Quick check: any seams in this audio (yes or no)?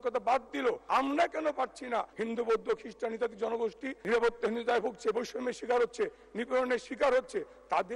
yes